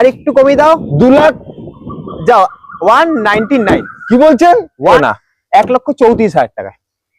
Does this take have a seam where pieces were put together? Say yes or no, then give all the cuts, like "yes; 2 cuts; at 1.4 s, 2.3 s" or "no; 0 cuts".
yes; 1 cut; at 4.9 s